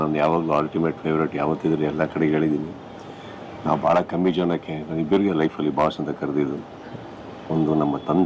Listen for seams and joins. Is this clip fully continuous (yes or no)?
yes